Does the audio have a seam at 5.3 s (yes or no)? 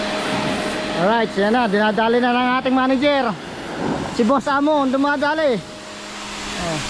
no